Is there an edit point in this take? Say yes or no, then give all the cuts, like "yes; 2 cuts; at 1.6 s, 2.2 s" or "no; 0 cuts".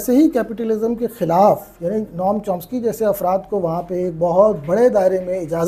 no; 0 cuts